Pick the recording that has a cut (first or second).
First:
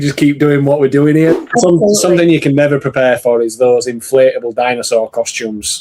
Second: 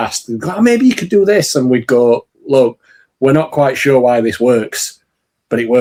first